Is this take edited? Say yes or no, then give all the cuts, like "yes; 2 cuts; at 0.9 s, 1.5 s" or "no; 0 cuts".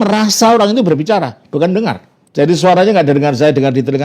yes; 1 cut; at 2.1 s